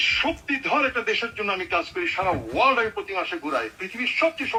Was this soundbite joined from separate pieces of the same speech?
no; 0 cuts

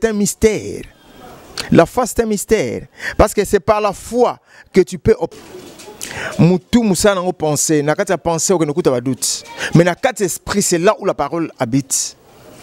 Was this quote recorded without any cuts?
no; 1 cut; at 5.3 s

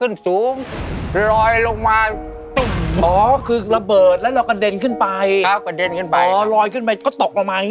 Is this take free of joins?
yes; 0 cuts

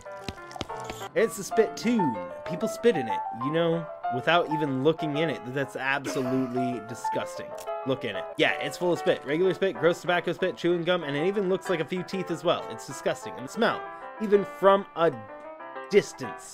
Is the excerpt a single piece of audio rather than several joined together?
no; 1 cut; at 0.9 s

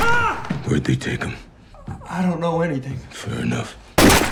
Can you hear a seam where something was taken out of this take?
no; 0 cuts

